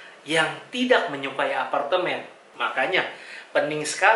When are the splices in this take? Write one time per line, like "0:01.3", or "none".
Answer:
0:02.6